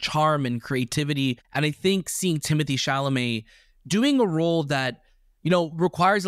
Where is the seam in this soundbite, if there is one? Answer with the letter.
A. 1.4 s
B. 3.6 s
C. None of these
A